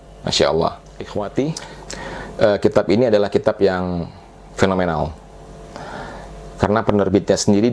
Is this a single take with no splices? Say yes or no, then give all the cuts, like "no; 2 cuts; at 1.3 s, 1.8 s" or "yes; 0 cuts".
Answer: no; 1 cut; at 0.9 s